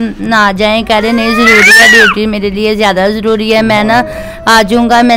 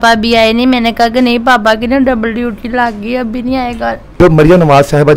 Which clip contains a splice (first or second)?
second